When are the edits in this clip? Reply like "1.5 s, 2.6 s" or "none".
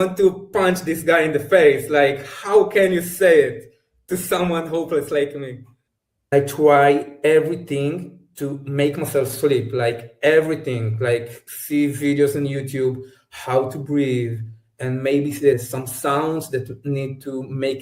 6.3 s, 15.6 s